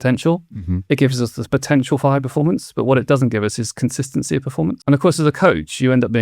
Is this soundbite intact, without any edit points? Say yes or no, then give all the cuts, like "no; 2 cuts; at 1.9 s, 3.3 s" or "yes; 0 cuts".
no; 1 cut; at 4.8 s